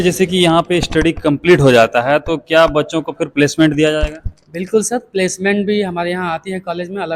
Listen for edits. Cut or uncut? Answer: uncut